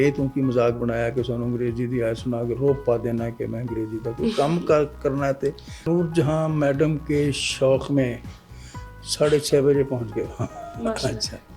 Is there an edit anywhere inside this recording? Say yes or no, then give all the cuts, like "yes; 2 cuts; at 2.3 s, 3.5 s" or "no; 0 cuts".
yes; 1 cut; at 5.8 s